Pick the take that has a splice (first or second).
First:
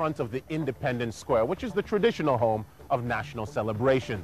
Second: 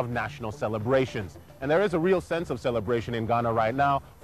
first